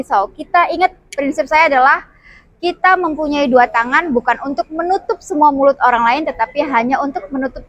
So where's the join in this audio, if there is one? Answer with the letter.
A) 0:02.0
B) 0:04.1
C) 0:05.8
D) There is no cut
D